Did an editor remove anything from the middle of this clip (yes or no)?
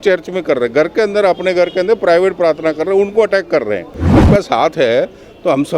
yes